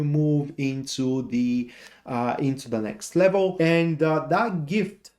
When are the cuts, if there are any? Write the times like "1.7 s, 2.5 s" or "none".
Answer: 3.5 s